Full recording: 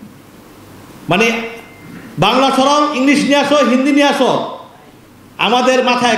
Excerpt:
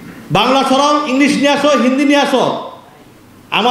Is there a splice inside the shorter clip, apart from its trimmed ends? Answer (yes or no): no